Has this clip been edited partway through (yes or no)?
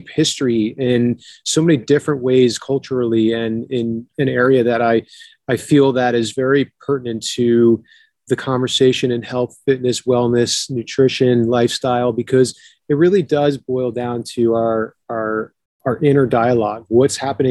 yes